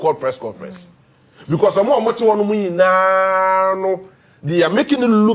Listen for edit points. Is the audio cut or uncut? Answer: uncut